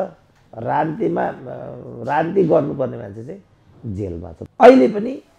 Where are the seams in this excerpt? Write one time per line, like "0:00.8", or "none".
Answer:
0:04.3